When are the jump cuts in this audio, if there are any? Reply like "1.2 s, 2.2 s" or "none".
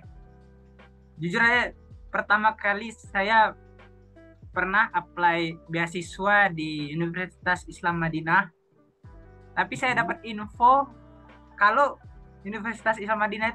none